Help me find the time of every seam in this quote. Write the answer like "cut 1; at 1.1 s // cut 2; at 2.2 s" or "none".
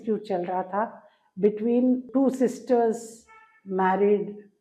cut 1; at 2.1 s